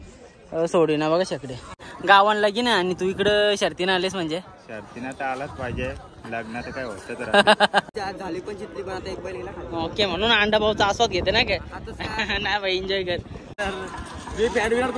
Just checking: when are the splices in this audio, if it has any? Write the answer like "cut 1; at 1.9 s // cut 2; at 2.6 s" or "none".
cut 1; at 1.9 s // cut 2; at 7.9 s // cut 3; at 13.6 s